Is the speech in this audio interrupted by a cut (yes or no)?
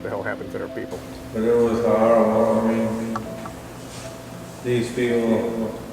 yes